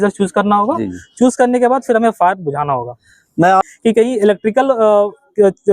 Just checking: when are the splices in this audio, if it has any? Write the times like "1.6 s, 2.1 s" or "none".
3.6 s